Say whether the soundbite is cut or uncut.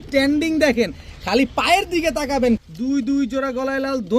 cut